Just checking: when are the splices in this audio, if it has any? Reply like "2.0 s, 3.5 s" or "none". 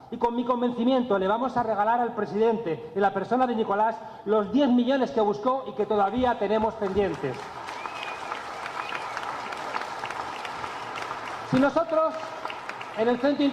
9.3 s